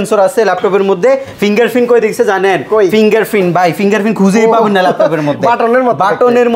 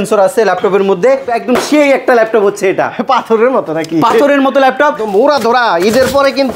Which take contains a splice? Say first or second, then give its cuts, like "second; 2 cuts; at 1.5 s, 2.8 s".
second; 2 cuts; at 1.3 s, 5.0 s